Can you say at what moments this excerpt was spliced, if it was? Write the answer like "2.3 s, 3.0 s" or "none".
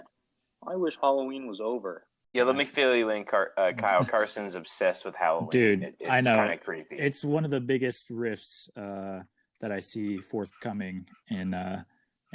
2.3 s